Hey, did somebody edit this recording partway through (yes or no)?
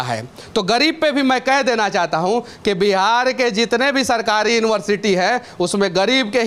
no